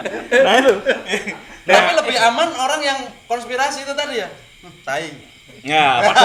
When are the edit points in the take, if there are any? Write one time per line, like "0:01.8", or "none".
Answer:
none